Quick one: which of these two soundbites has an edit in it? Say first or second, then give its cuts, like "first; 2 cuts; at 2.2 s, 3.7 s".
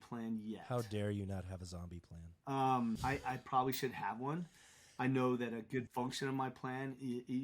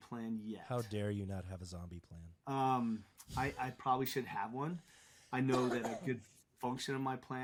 first; 2 cuts; at 3.0 s, 5.9 s